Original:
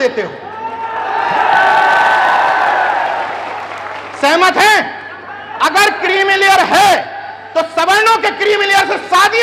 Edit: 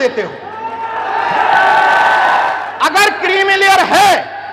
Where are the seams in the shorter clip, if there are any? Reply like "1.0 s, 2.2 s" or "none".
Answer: 2.6 s

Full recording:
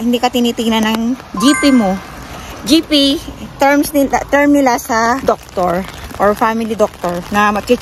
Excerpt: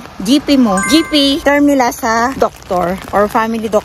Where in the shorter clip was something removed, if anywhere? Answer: 1.4 s, 3.0 s

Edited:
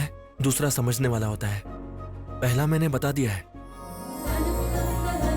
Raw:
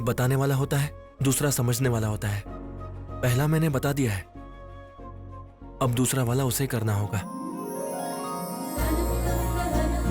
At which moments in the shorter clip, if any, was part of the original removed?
4.0 s

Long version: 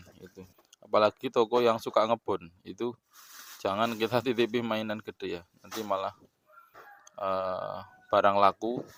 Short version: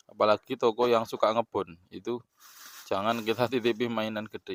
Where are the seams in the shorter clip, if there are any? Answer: none

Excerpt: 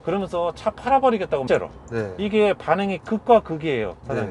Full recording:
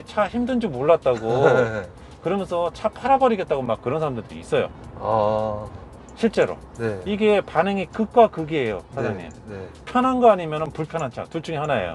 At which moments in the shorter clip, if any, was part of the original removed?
1.5 s

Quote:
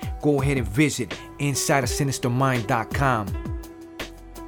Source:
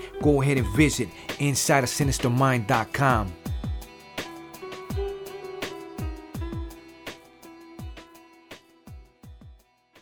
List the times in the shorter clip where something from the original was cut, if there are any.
3.4 s

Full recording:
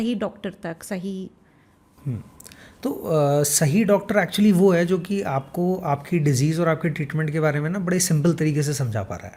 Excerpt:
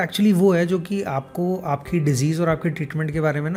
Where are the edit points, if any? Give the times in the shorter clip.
none

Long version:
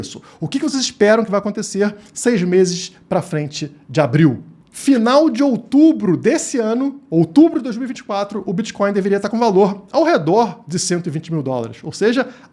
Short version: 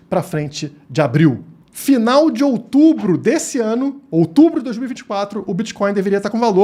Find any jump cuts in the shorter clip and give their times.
none

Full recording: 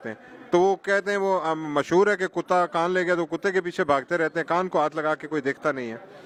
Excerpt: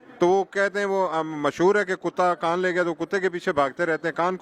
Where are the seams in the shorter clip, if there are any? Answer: none

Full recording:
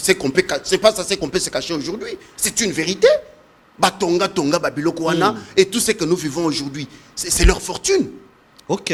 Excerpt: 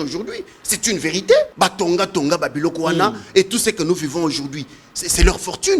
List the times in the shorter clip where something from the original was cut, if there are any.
1.5 s

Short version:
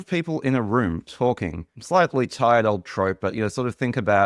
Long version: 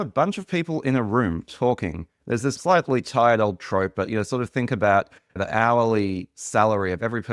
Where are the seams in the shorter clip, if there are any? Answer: 1.8 s

